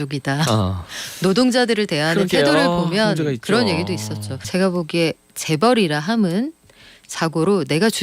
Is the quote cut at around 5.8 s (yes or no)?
no